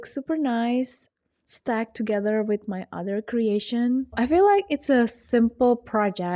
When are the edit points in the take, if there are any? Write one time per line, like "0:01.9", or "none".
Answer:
0:04.2